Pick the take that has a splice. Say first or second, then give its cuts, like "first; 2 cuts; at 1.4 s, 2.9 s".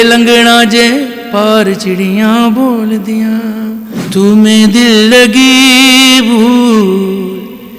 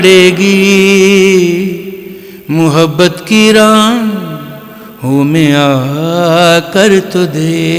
first; 1 cut; at 3.9 s